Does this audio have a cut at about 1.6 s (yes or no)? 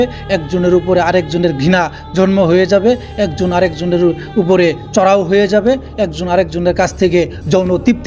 no